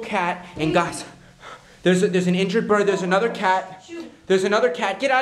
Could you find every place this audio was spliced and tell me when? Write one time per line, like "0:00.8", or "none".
none